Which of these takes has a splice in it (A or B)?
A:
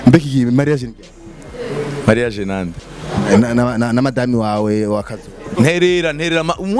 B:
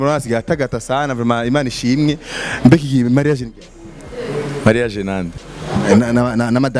A